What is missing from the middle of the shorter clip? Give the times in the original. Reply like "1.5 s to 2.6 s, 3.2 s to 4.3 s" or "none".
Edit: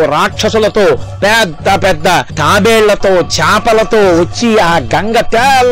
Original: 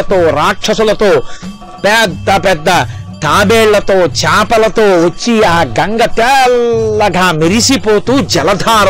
1.3 s to 1.7 s, 2.9 s to 3.2 s